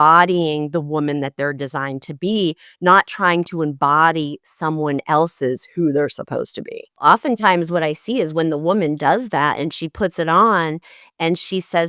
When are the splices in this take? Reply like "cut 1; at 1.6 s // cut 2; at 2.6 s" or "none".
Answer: cut 1; at 7.0 s